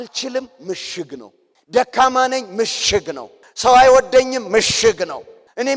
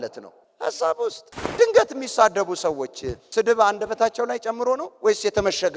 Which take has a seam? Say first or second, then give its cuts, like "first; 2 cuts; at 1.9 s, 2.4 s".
second; 1 cut; at 1.4 s